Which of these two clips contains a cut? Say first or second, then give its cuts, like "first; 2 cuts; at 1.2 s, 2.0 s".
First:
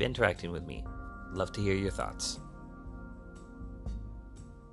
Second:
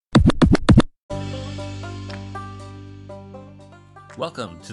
second; 1 cut; at 1.0 s